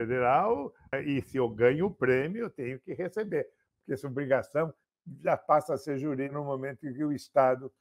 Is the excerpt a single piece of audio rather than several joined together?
no; 2 cuts; at 0.8 s, 6.4 s

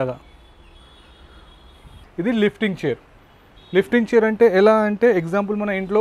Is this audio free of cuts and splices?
no; 1 cut; at 2.0 s

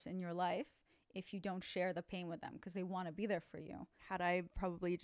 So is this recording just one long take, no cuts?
no; 1 cut; at 4.0 s

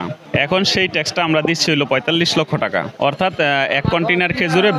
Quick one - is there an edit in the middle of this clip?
no; 0 cuts

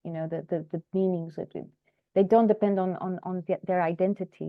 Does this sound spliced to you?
no; 0 cuts

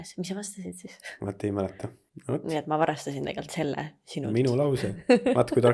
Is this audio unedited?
no; 1 cut; at 2.0 s

